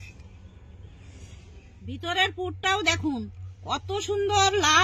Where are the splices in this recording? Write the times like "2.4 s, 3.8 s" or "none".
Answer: 1.7 s